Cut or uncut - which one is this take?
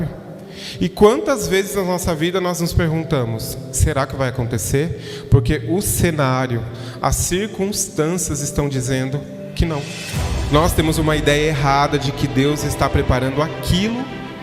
cut